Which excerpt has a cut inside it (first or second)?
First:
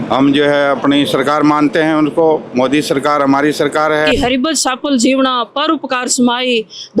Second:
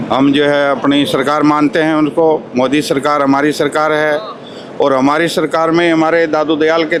first